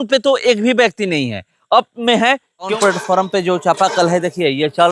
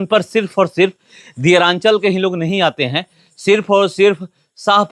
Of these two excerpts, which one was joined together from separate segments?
first; 1 cut; at 2.7 s

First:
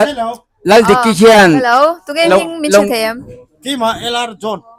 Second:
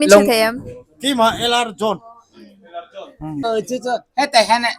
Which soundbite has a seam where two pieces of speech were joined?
second; 1 cut; at 3.4 s

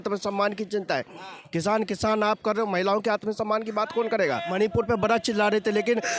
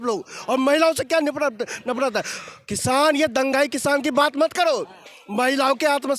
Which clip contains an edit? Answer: first; 1 cut; at 4.5 s

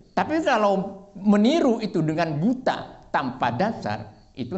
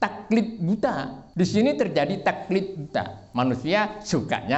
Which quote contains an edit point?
second; 2 cuts; at 1.2 s, 3.2 s

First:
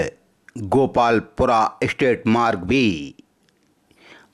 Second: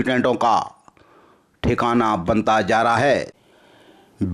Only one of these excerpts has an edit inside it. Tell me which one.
second; 1 cut; at 3.4 s

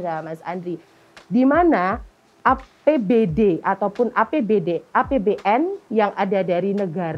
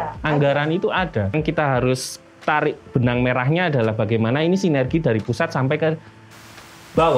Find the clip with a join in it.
second; 1 cut; at 1.3 s

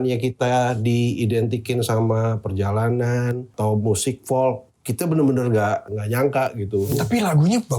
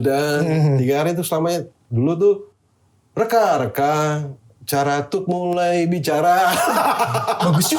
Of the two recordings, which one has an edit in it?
first; 3 cuts; at 3.5 s, 5.9 s, 6.9 s

